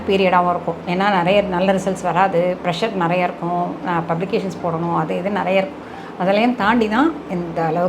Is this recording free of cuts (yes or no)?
yes